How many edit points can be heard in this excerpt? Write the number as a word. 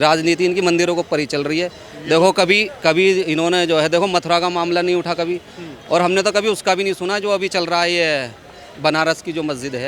zero